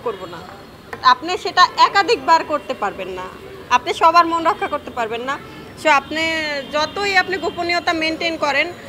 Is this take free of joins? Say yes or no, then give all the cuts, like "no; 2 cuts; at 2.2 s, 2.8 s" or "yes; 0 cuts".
no; 1 cut; at 1.0 s